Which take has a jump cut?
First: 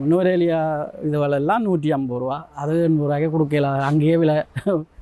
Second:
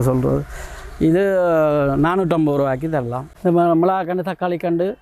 second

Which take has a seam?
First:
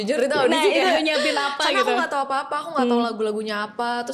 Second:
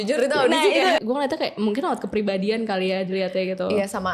second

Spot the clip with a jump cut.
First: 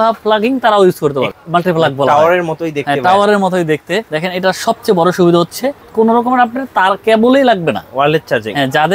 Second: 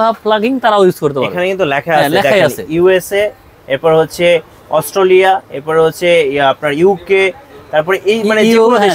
first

